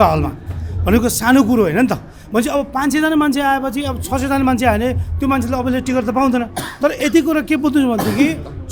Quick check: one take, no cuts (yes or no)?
yes